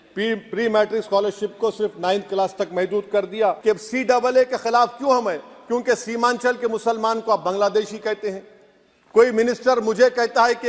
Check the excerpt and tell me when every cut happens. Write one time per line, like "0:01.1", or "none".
0:03.6